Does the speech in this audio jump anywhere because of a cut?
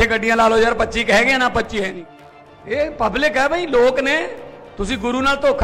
yes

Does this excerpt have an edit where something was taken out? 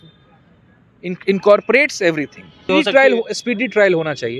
yes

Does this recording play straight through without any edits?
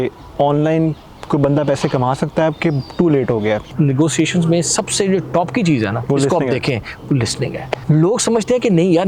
no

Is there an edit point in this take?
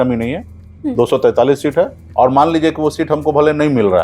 yes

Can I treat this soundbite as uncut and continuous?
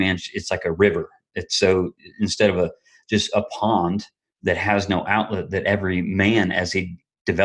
yes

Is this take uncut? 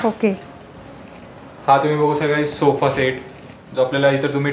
yes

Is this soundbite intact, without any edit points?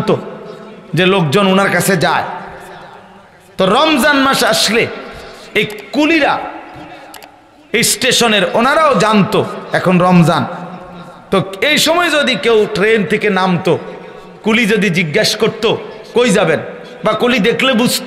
yes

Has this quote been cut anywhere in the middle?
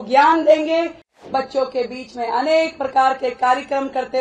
yes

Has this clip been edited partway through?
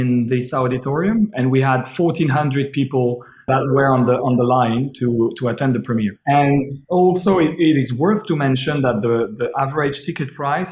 yes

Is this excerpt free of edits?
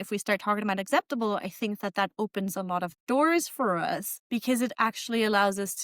no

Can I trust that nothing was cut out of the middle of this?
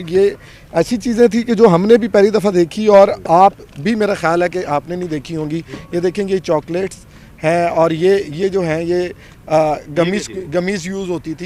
yes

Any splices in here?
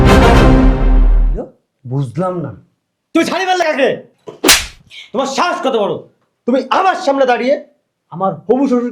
no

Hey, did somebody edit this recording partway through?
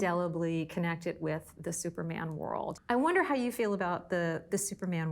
yes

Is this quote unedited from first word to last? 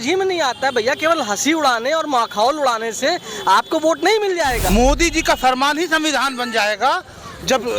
no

